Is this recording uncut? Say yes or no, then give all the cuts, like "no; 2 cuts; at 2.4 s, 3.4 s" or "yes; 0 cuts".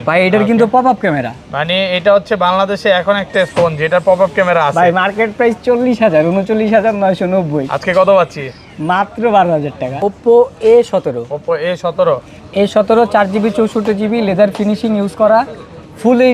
no; 1 cut; at 9.9 s